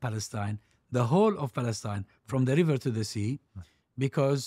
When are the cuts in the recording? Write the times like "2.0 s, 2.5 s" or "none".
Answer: none